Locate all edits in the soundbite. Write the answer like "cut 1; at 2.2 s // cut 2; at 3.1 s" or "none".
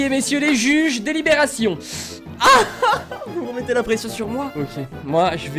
cut 1; at 1.8 s // cut 2; at 4.5 s